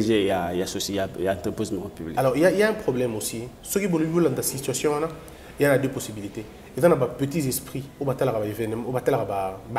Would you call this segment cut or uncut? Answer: uncut